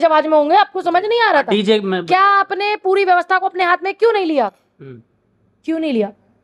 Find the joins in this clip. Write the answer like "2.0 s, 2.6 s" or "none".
none